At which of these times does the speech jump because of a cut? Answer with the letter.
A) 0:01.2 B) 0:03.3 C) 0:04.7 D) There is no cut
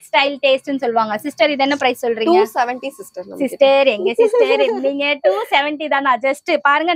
D